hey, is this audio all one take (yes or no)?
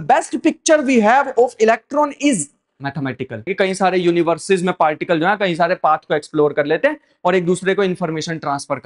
no